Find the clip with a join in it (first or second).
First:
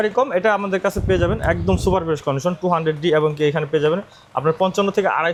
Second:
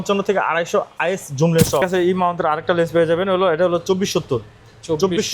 second